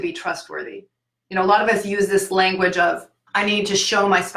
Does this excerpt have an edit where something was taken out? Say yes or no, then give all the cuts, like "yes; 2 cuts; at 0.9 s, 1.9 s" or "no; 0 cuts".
yes; 1 cut; at 3.1 s